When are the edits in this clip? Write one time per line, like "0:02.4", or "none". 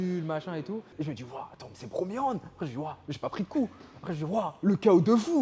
0:00.9

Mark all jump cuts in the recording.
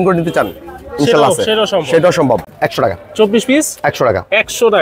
0:02.5

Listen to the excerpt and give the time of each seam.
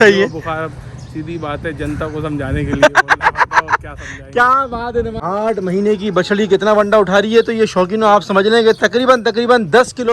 0:05.2

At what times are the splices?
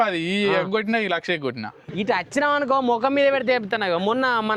0:01.8

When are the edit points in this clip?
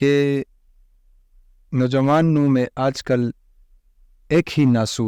none

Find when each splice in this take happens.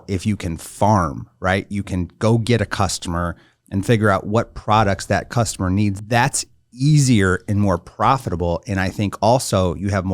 0:05.9

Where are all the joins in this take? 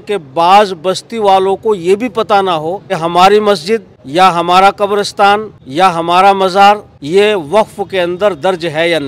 0:03.0
0:04.0
0:05.6
0:06.9

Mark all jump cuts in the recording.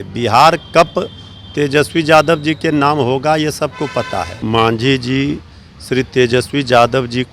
0:04.3

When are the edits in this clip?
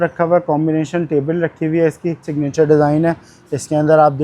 0:02.3

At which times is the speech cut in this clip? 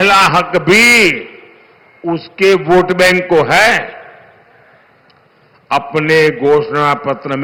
none

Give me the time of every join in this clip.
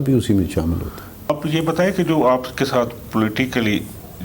0:01.3

